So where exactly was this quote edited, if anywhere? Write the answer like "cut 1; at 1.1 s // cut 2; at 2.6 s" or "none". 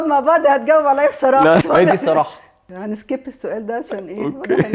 cut 1; at 1.6 s // cut 2; at 2.8 s